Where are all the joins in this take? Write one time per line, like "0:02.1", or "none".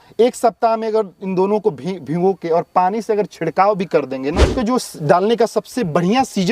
0:04.6